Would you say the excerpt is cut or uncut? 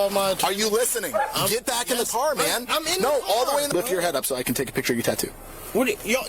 cut